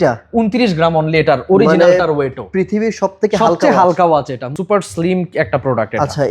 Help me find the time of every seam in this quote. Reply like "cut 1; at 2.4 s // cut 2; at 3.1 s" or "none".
cut 1; at 4.5 s